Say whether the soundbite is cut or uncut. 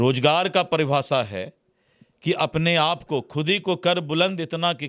uncut